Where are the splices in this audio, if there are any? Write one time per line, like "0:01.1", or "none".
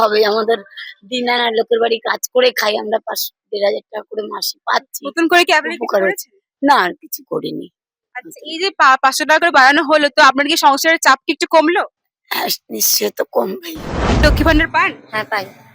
0:14.2